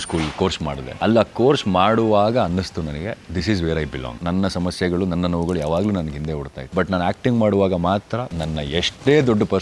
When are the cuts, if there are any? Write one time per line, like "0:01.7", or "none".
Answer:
0:00.9
0:04.2
0:06.5
0:08.3